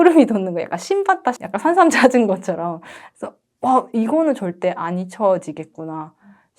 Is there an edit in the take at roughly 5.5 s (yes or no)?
no